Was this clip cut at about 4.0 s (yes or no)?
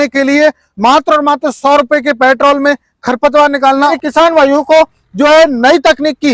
yes